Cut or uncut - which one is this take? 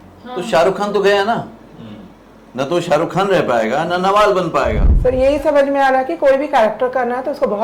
cut